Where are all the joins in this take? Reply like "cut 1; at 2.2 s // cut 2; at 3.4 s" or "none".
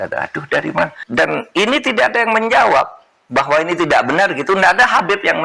cut 1; at 1.0 s